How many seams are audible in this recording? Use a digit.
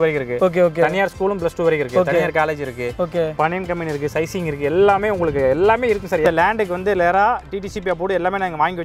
1